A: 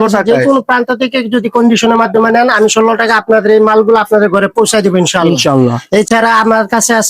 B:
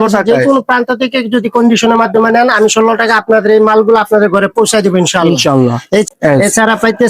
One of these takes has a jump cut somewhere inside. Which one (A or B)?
B